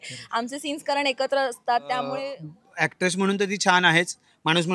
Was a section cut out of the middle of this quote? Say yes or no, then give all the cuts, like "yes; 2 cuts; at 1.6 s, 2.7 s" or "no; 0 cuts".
yes; 1 cut; at 2.2 s